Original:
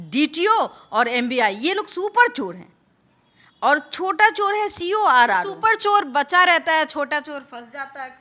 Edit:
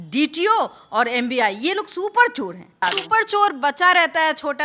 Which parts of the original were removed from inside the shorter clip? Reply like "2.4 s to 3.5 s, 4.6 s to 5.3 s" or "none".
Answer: 2.8 s to 5.3 s